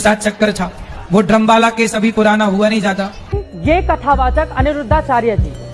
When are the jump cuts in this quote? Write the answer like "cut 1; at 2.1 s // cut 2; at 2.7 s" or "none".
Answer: cut 1; at 3.3 s

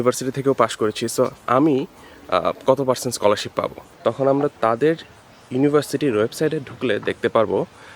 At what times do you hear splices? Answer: cut 1; at 3.8 s

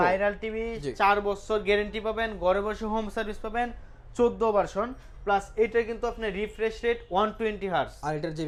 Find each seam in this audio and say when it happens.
none

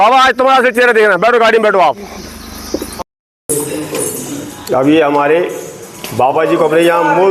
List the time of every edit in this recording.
cut 1; at 3.0 s

